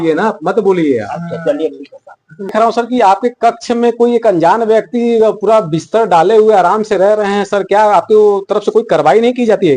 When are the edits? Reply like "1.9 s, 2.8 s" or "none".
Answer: 2.5 s